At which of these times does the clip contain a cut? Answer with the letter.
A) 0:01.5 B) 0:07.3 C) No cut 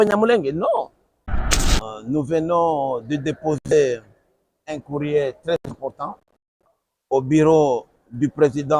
A